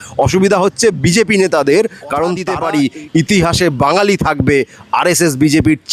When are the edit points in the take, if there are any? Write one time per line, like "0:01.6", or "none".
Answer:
0:02.5